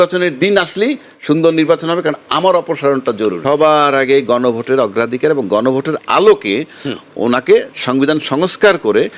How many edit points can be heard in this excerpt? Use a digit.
1